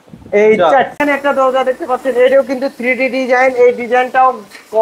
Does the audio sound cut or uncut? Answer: cut